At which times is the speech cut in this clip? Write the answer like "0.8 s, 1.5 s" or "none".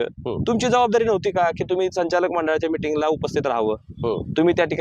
none